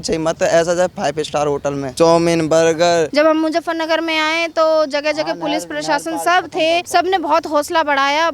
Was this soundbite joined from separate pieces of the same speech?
yes; 1 cut; at 3.1 s

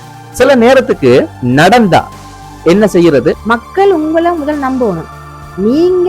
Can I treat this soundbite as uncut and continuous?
no; 2 cuts; at 1.4 s, 3.4 s

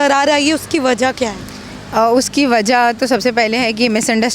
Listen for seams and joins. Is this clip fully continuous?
yes; 0 cuts

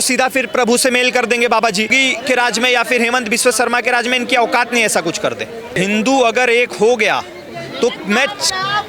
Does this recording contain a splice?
yes; 2 cuts; at 2.0 s, 5.8 s

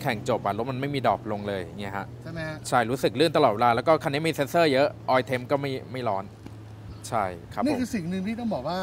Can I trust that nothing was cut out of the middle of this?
yes; 0 cuts

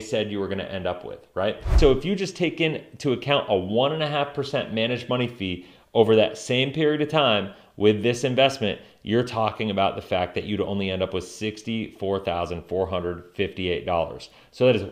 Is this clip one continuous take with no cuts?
no; 1 cut; at 1.7 s

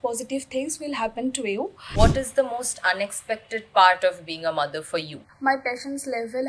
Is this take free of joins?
no; 2 cuts; at 1.8 s, 5.2 s

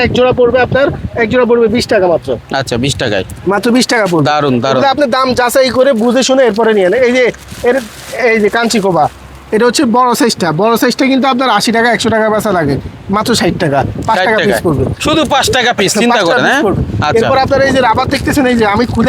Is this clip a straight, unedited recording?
yes; 0 cuts

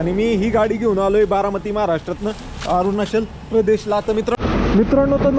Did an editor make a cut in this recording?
yes; 1 cut; at 4.4 s

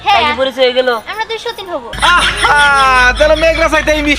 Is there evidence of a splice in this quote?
yes; 1 cut; at 1.9 s

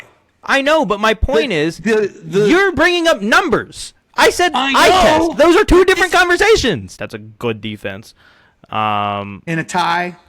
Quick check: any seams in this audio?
yes; 1 cut; at 7.0 s

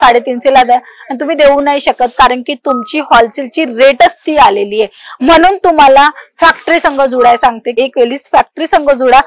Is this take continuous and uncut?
yes; 0 cuts

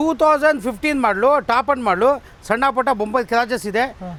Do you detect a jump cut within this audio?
no; 0 cuts

